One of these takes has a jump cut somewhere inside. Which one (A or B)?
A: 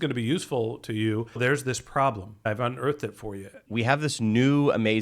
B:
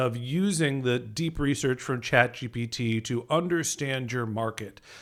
A